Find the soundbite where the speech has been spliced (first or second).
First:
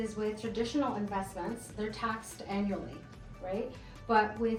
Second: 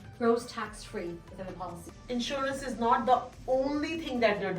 second